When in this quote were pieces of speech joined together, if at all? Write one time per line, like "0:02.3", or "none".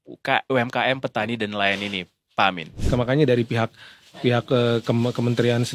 0:02.8

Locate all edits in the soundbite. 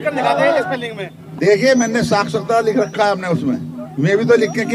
none

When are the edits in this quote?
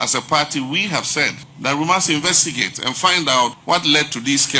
0:01.4
0:03.6

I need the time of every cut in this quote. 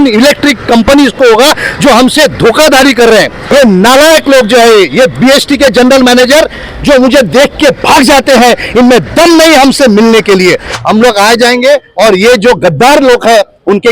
0:03.4
0:10.7

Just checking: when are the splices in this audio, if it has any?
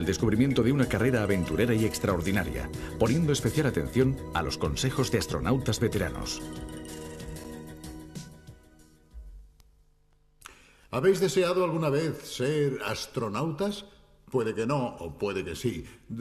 0:07.3

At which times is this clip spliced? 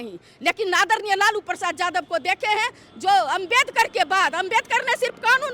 none

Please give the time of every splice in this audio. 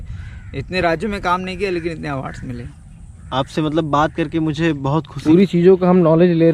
0:05.2

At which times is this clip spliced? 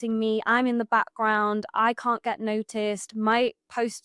none

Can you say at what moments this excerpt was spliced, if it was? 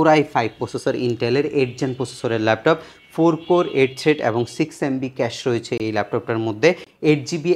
none

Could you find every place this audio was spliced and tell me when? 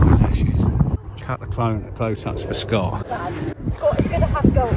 0:01.0
0:03.0

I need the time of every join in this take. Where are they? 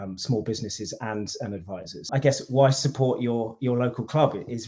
0:02.1

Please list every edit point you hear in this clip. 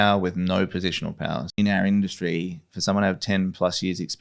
0:01.6

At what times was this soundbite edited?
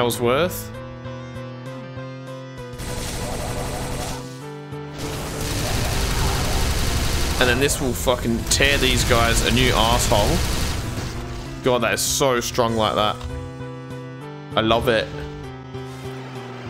none

